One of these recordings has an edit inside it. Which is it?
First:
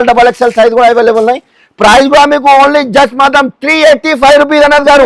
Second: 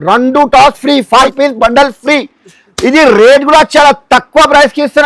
second; 1 cut; at 1.3 s

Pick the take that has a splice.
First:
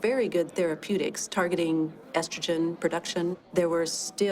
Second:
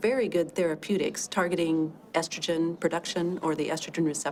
first; 1 cut; at 3.4 s

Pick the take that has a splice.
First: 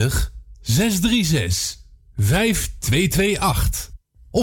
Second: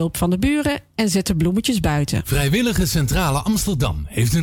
second; 1 cut; at 2.3 s

